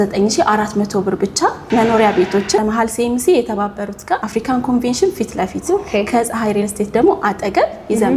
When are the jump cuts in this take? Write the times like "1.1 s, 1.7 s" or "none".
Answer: 4.2 s